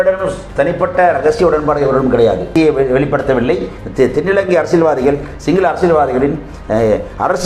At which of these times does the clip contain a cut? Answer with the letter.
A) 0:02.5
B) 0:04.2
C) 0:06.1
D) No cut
A